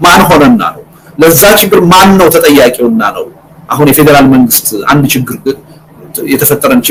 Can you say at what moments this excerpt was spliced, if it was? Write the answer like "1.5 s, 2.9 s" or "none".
none